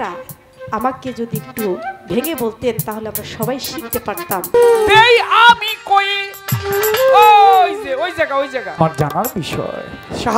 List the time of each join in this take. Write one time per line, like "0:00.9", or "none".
0:04.5
0:08.8